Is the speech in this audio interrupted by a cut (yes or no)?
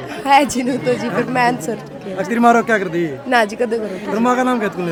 no